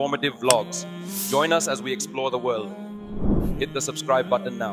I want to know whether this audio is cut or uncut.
uncut